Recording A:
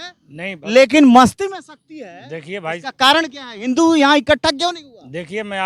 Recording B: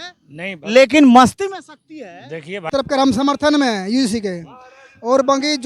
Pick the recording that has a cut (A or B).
B